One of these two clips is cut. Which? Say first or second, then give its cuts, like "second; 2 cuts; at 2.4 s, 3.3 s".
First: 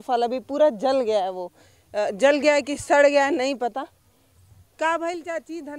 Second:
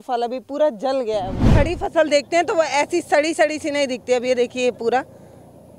second; 1 cut; at 1.4 s